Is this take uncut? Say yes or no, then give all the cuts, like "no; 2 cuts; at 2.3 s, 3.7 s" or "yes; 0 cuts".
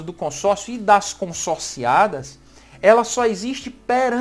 yes; 0 cuts